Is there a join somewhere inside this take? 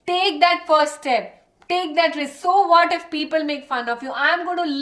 no; 0 cuts

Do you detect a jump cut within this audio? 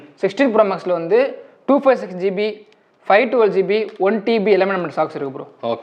no; 0 cuts

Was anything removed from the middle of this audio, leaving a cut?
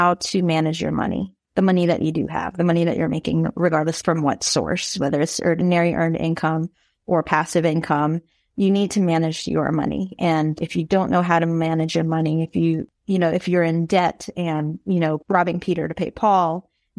yes; 5 cuts; at 4.0 s, 5.6 s, 10.6 s, 12.8 s, 15.2 s

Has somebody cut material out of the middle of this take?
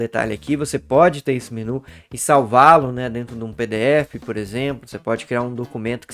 no; 0 cuts

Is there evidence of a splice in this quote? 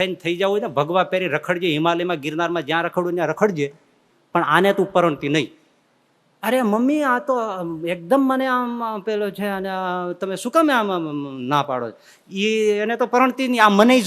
no; 0 cuts

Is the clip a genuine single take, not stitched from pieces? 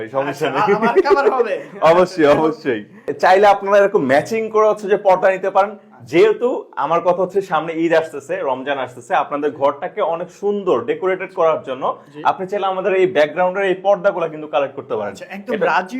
no; 1 cut; at 3.1 s

